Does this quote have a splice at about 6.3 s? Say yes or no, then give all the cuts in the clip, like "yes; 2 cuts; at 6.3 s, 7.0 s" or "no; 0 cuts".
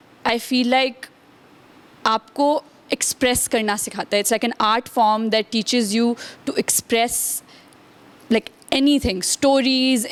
no; 0 cuts